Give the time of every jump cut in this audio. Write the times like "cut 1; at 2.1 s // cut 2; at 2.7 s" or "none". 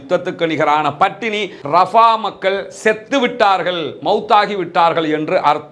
cut 1; at 1.6 s